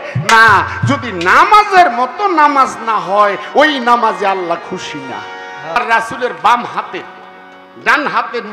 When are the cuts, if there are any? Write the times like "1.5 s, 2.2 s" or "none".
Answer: 5.8 s